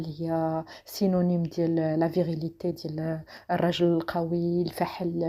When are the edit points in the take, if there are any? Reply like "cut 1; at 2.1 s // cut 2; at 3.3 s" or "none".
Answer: none